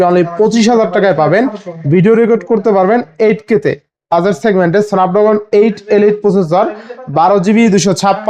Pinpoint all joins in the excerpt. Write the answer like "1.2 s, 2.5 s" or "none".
4.1 s